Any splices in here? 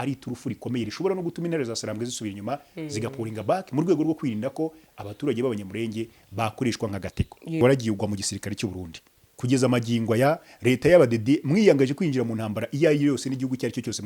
yes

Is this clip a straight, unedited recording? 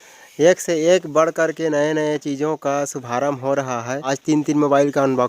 no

